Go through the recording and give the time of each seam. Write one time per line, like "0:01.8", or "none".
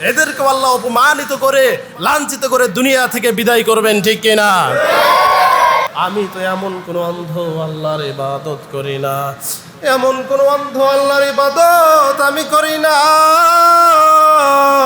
0:05.9